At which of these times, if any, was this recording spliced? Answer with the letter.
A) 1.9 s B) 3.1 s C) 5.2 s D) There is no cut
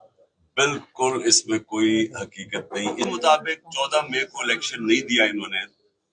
B